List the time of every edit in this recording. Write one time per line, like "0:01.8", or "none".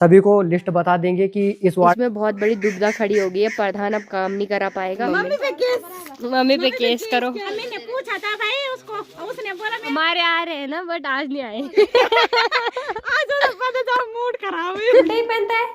0:02.0
0:05.0
0:07.5
0:09.9
0:15.0

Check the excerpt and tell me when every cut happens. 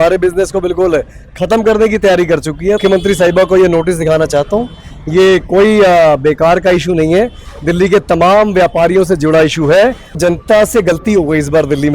0:02.8
0:10.2

